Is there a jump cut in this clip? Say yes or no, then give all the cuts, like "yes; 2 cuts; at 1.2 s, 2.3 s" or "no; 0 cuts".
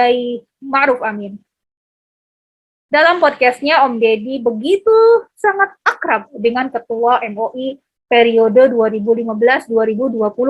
no; 0 cuts